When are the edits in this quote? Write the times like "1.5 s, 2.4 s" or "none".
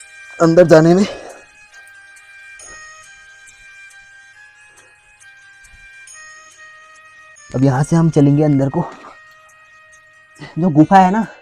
7.3 s